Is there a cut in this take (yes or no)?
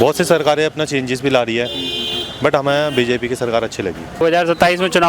yes